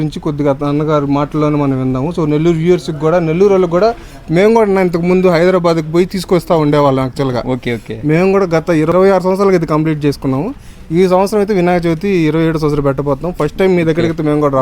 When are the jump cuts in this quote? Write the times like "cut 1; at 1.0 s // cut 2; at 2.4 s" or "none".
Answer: cut 1; at 8.9 s